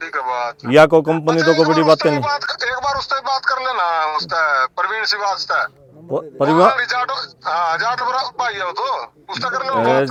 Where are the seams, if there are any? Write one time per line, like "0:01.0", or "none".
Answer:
none